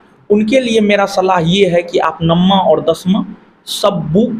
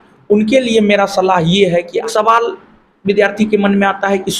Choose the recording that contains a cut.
second; 1 cut; at 2.0 s

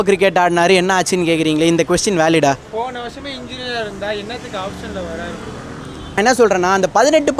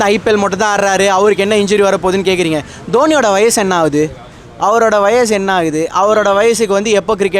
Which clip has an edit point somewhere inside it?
first; 1 cut; at 6.1 s

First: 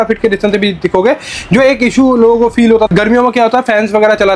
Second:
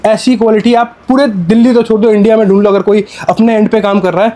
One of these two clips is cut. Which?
first; 1 cut; at 2.9 s

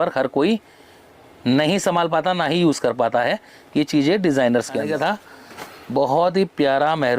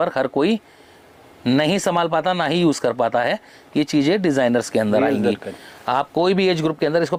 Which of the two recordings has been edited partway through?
first; 1 cut; at 4.8 s

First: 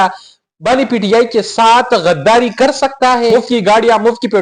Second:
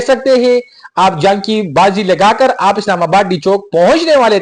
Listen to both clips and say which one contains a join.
first; 1 cut; at 3.3 s

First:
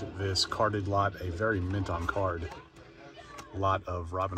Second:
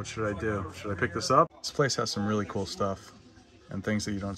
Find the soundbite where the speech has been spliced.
second; 1 cut; at 1.6 s

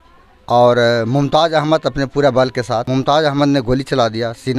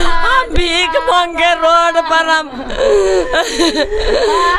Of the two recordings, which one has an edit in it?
first; 1 cut; at 2.9 s

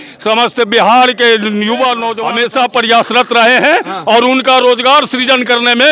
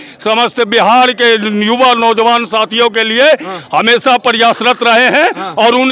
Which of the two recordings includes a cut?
first; 1 cut; at 2.1 s

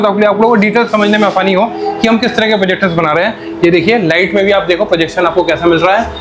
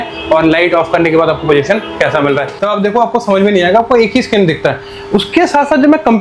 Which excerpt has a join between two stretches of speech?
second; 1 cut; at 2.5 s

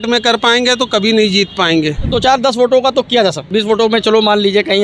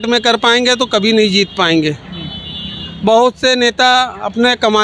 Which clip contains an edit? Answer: first; 2 cuts; at 2.1 s, 3.4 s

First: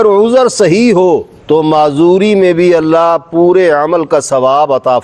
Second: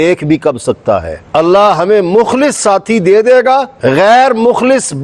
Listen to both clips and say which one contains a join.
second; 1 cut; at 1.2 s

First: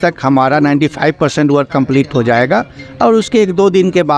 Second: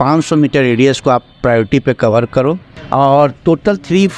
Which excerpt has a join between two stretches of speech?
second; 1 cut; at 2.7 s

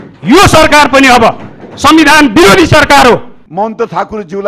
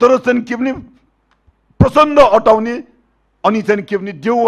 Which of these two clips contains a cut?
first; 1 cut; at 3.4 s

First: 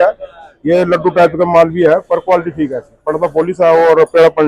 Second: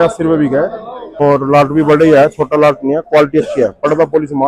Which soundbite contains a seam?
second; 1 cut; at 1.2 s

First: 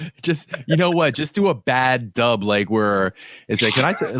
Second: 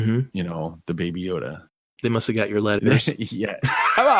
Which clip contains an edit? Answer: second; 1 cut; at 2.8 s

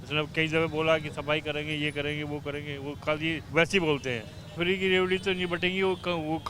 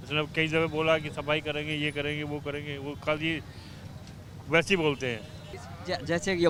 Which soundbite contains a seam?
first; 2 cuts; at 3.4 s, 4.6 s

